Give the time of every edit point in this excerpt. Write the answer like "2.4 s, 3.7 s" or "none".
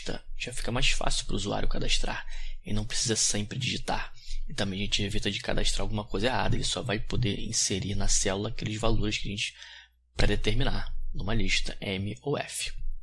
none